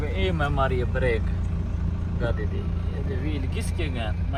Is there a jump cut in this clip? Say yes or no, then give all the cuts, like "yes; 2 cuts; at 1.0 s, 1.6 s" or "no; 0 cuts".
no; 0 cuts